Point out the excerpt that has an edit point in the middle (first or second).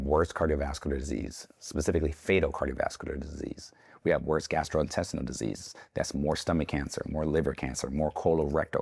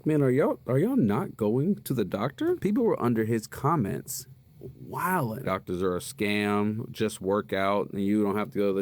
second